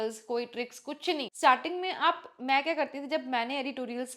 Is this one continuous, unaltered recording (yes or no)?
no